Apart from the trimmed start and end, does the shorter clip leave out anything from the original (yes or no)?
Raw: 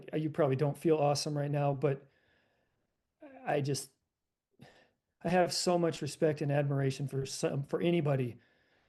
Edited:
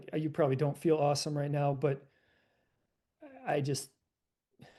no